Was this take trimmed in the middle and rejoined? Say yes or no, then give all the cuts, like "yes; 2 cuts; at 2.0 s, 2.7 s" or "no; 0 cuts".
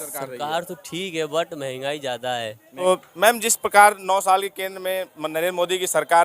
yes; 1 cut; at 2.6 s